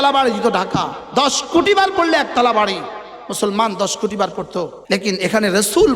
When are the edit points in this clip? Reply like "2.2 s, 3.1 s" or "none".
4.8 s